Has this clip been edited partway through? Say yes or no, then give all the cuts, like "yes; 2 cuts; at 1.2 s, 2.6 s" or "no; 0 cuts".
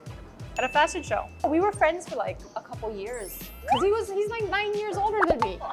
no; 0 cuts